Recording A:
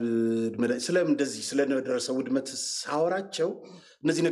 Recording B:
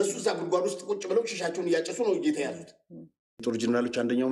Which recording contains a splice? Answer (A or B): B